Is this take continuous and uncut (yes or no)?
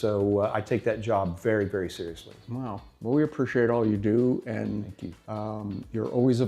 yes